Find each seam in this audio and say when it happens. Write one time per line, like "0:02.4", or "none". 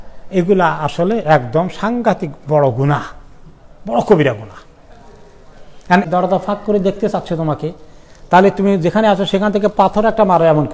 0:06.0